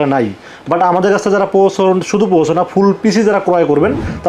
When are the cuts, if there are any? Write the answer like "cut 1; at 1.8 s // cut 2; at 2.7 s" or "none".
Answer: none